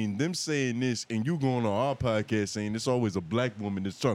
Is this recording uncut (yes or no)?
yes